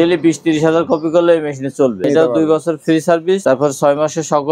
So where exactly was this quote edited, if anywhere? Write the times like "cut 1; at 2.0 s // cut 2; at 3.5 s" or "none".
cut 1; at 2.0 s // cut 2; at 3.4 s